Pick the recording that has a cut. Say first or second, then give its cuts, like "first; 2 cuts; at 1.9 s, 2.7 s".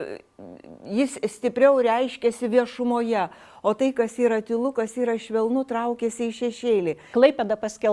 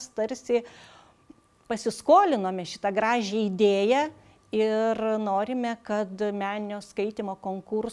first; 1 cut; at 7.0 s